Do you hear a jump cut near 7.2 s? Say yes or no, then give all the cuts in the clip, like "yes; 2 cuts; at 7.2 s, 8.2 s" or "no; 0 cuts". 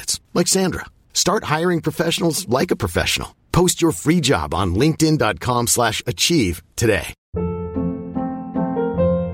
yes; 1 cut; at 7.2 s